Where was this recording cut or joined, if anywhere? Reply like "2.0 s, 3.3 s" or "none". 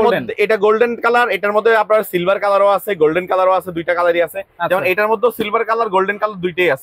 none